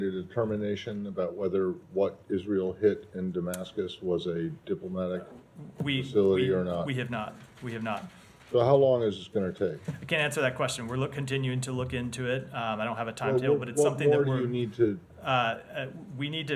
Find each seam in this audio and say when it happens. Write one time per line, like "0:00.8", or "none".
none

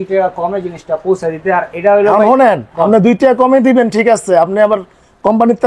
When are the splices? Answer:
none

